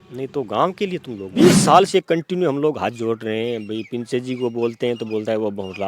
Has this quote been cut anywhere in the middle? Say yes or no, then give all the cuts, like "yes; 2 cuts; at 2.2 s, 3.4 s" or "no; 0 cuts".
yes; 1 cut; at 1.2 s